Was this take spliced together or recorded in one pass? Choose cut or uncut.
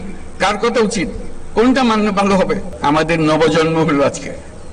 cut